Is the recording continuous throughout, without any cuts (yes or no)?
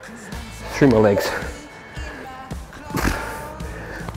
yes